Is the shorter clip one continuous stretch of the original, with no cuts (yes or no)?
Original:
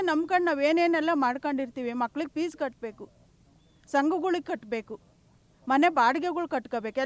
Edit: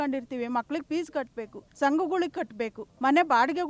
no